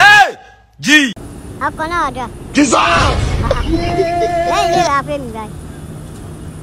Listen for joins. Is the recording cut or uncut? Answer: uncut